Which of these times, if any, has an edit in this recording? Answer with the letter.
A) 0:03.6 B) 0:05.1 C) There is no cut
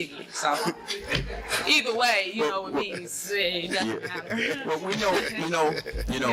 C